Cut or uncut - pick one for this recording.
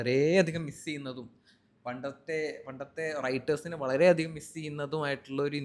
uncut